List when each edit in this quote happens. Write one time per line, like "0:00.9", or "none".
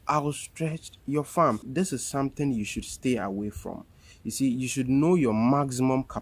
0:01.7